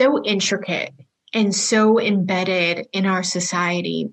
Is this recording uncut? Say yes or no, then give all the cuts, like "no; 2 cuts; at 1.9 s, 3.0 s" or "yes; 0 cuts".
yes; 0 cuts